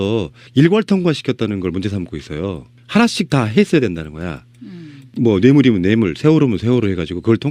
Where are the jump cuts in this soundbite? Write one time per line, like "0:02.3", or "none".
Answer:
0:03.6